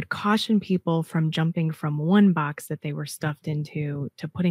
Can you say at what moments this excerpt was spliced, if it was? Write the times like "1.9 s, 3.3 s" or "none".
none